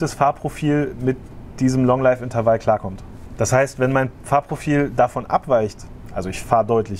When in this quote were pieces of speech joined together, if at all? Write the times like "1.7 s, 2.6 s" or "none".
none